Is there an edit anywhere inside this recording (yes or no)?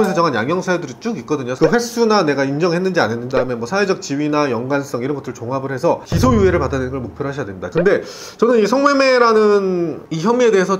yes